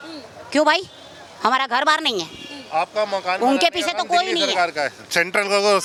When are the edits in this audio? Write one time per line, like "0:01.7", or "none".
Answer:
none

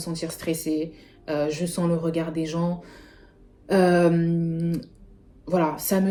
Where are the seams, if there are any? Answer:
none

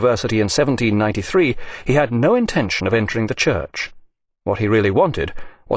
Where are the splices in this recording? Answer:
0:01.3

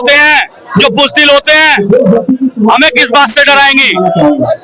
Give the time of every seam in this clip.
none

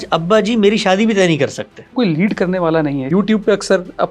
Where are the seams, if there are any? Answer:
0:01.9
0:03.1

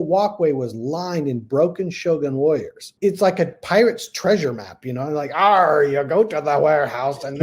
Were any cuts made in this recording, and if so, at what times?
0:02.8

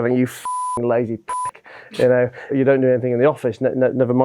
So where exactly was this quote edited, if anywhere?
0:02.5

